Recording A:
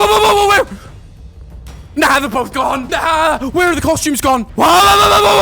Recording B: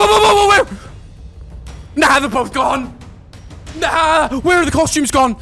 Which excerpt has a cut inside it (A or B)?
A